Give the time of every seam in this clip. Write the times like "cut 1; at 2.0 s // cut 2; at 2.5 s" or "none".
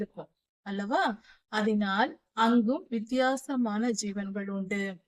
none

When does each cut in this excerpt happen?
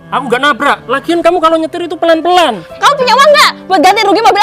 cut 1; at 2.7 s

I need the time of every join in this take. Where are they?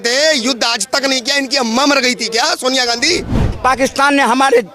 cut 1; at 3.4 s

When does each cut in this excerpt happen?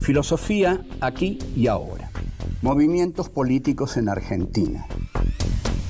none

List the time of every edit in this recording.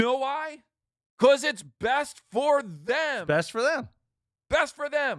none

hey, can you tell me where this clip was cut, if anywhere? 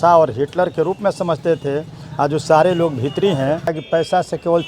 cut 1; at 3.8 s

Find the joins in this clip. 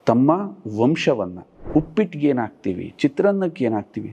cut 1; at 1.5 s

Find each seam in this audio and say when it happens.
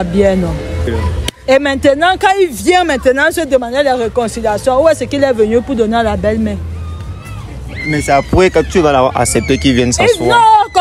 cut 1; at 0.9 s

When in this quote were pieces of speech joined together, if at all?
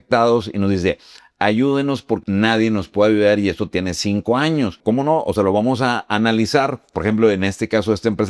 cut 1; at 2.2 s // cut 2; at 4.8 s // cut 3; at 6.9 s

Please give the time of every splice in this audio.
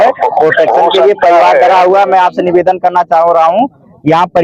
none

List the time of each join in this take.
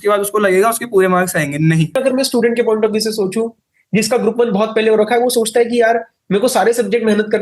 cut 1; at 1.9 s

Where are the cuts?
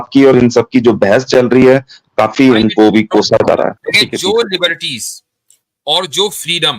cut 1; at 3.8 s

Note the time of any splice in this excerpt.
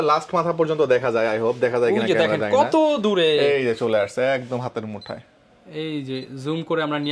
none

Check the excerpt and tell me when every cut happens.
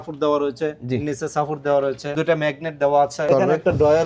cut 1; at 2.1 s // cut 2; at 3.2 s

